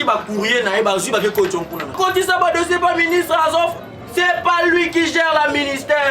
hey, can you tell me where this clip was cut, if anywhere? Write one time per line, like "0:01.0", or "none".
0:01.9